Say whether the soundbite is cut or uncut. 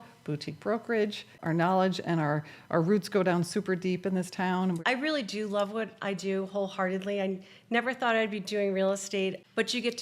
cut